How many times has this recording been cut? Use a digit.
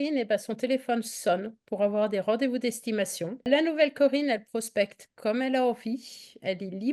1